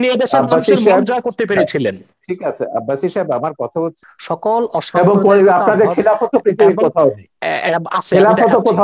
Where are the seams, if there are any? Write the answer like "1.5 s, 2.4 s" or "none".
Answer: 4.0 s